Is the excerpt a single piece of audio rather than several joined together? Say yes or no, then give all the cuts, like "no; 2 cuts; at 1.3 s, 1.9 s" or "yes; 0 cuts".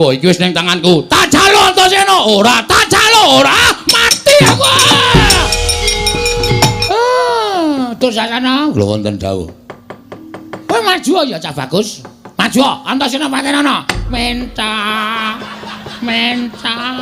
no; 1 cut; at 6.8 s